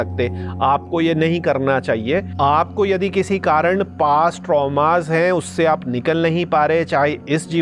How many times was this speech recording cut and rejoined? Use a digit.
1